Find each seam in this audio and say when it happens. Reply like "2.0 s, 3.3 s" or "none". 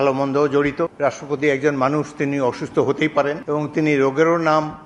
0.9 s, 3.4 s

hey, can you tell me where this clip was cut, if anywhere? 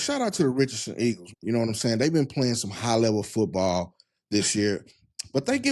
1.3 s

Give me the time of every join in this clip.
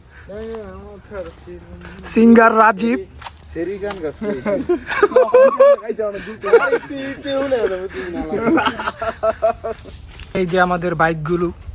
none

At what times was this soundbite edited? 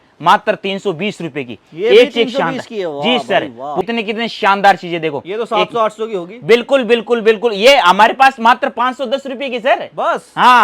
3.8 s

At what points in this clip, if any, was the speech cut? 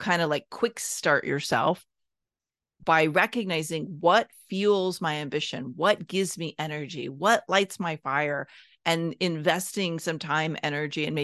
none

